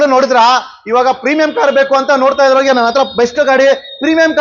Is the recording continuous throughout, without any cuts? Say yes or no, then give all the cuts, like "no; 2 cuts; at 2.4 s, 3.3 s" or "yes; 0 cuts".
yes; 0 cuts